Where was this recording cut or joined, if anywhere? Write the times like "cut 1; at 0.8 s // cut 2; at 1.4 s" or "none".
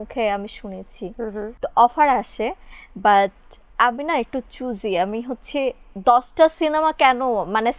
cut 1; at 1.5 s